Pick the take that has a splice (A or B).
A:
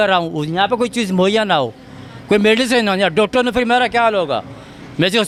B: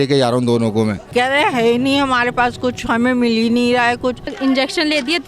B